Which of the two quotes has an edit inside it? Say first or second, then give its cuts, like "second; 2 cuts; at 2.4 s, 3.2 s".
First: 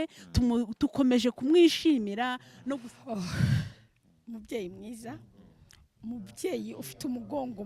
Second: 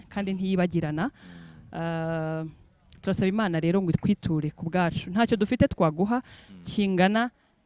first; 1 cut; at 2.5 s